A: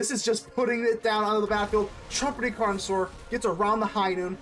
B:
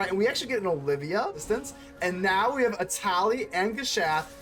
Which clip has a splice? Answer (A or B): B